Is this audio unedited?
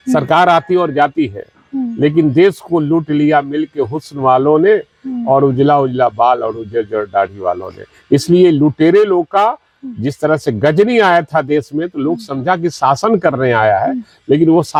yes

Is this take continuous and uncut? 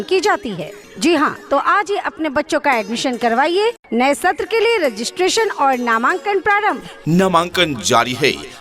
no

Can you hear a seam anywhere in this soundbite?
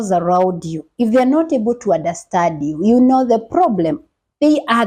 no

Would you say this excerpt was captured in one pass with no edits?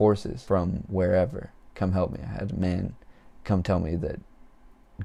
yes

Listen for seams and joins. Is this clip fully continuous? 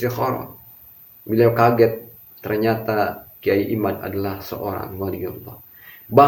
yes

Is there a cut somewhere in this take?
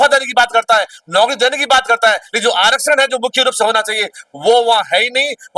no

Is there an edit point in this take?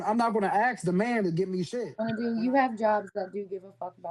yes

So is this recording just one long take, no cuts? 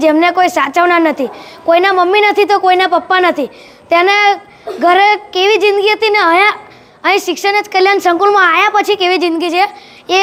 yes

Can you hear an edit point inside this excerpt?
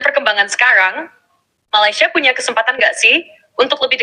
no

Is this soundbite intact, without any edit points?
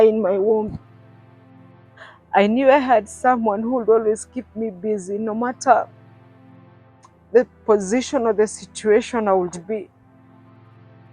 no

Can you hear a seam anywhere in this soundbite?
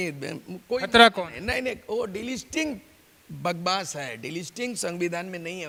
no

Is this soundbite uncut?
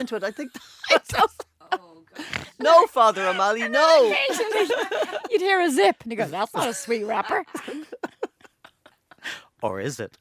yes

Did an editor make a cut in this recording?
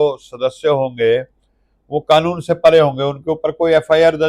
no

